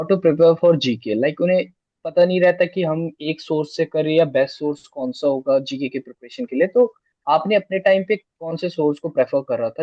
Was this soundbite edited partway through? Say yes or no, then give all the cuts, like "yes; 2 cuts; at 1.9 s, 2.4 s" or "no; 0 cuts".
no; 0 cuts